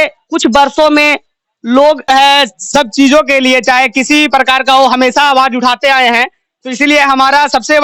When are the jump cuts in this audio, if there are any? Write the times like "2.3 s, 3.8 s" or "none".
2.1 s